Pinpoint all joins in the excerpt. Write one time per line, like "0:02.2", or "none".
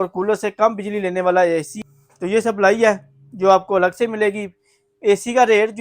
0:01.7